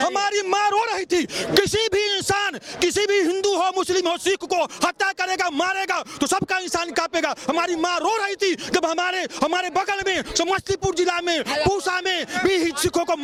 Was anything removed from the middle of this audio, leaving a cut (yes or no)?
no